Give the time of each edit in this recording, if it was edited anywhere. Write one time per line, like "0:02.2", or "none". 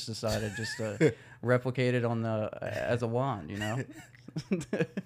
none